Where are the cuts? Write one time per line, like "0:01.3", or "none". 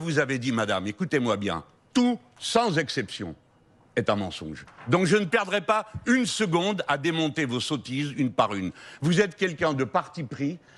none